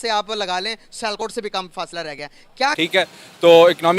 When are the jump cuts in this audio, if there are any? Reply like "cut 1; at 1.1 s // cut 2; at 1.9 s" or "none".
cut 1; at 2.8 s